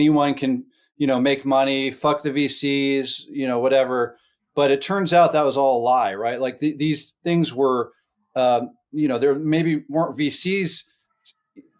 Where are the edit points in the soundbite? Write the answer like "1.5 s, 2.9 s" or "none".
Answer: none